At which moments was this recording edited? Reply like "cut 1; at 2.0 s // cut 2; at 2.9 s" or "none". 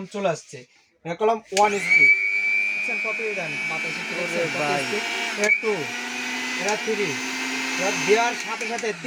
none